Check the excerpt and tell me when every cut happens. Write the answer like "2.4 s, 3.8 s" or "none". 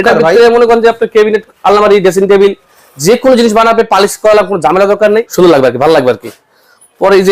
5.3 s